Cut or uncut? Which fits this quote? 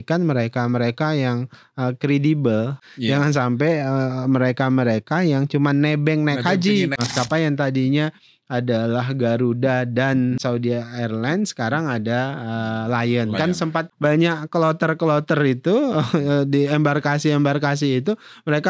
cut